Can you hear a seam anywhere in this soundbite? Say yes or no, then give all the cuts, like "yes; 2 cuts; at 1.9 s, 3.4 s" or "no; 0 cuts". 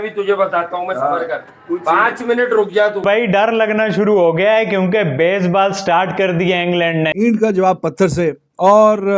yes; 2 cuts; at 3.1 s, 7.1 s